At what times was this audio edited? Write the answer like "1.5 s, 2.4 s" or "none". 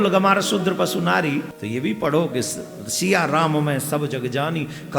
1.6 s

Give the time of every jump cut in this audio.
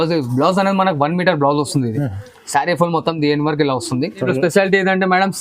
4.2 s

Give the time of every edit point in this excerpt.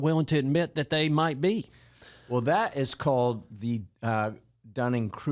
none

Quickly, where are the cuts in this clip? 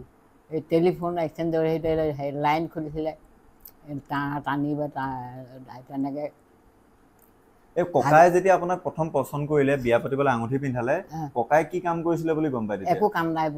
none

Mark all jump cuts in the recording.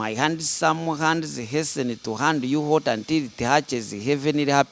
none

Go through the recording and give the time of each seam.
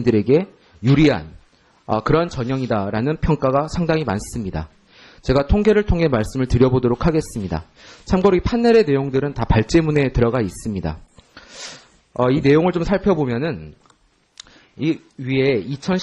2.4 s

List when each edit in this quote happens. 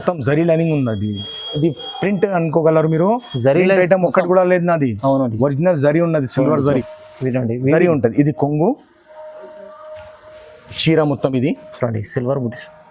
6.9 s

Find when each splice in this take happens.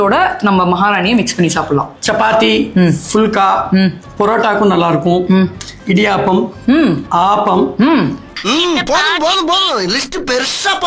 none

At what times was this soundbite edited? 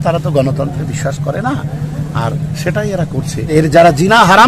3.5 s

